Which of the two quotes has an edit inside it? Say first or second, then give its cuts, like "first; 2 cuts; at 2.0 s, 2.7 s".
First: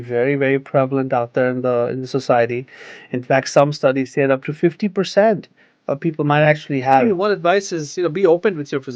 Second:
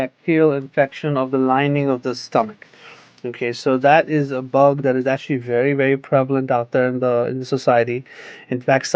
first; 1 cut; at 7.0 s